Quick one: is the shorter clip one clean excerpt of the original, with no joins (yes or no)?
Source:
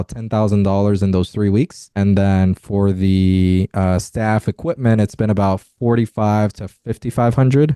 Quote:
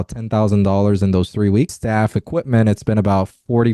no